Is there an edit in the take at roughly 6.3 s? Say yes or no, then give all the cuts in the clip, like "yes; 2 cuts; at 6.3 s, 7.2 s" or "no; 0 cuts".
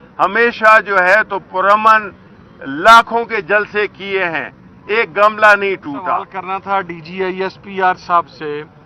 yes; 1 cut; at 6.3 s